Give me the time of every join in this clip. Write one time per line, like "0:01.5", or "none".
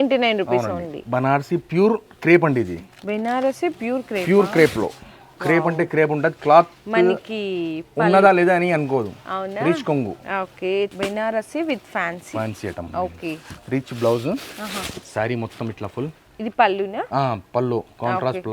0:01.0
0:10.9

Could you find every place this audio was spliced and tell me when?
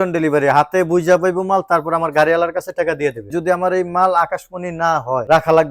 0:03.3

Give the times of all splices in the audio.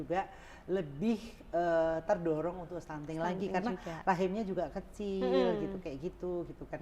none

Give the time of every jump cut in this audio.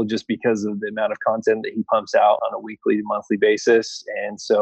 0:02.4

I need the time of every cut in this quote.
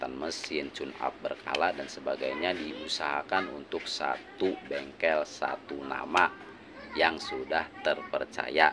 none

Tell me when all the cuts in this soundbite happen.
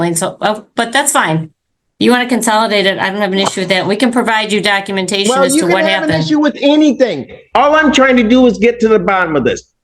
none

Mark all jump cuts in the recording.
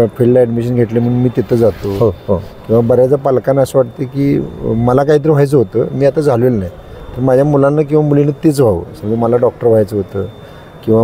none

